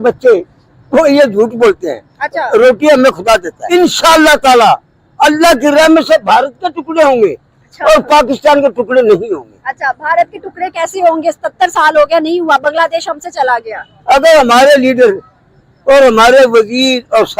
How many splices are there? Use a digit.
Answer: 1